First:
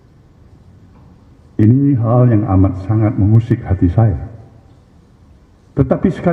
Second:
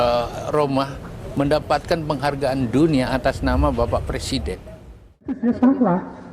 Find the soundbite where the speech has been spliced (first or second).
second